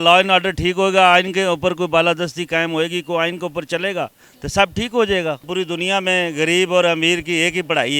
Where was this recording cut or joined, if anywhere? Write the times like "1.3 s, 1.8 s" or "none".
5.5 s